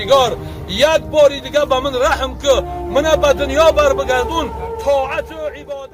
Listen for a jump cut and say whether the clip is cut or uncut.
uncut